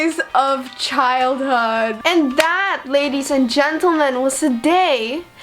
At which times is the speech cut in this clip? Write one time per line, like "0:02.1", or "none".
0:01.9